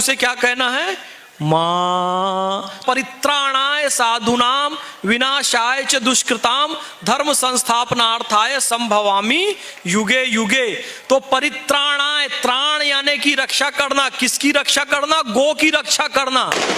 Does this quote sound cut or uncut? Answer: cut